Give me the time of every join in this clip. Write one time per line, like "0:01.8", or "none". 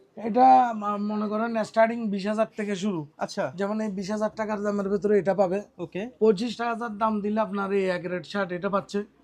none

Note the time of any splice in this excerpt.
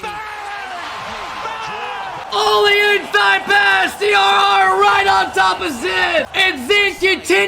0:02.2
0:06.3

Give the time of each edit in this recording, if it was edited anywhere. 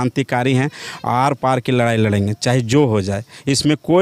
none

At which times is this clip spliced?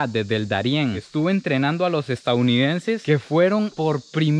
0:01.0
0:03.0

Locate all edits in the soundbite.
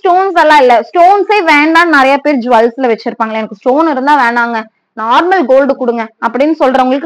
none

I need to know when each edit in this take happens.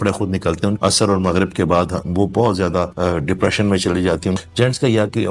0:00.8
0:02.9
0:04.4

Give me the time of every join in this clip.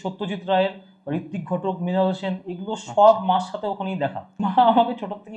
0:04.4

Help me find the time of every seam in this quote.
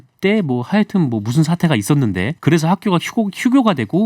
0:02.3

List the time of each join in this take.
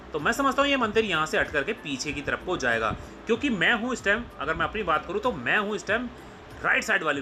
none

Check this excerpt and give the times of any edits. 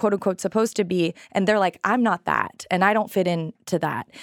none

